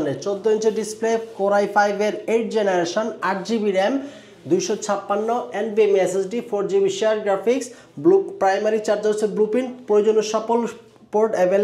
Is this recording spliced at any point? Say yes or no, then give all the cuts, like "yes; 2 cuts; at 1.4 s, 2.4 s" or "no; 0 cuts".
no; 0 cuts